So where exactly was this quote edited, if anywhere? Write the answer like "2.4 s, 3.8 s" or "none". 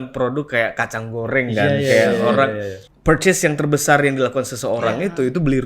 2.9 s